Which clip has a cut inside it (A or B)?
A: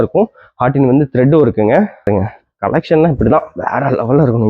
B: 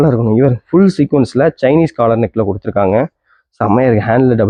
A